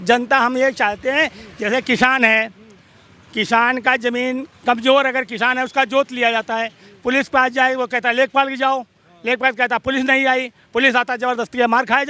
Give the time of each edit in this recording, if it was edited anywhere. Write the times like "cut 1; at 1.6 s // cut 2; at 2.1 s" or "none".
none